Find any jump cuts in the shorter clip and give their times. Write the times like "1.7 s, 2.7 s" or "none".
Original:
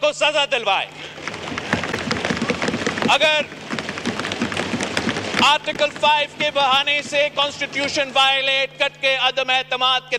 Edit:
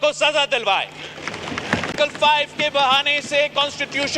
1.9 s